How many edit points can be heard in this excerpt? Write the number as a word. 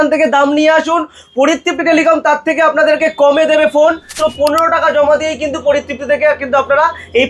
one